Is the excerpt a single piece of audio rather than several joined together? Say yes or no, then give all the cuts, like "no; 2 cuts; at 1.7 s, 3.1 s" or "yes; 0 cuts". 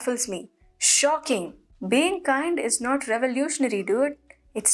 yes; 0 cuts